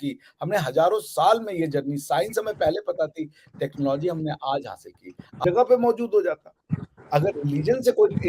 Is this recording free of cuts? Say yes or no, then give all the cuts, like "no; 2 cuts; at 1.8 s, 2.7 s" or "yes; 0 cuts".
no; 1 cut; at 5.4 s